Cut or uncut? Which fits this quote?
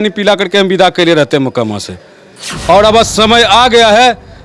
uncut